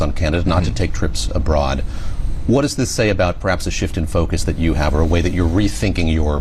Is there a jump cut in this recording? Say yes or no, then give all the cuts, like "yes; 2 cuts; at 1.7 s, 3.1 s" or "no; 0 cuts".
no; 0 cuts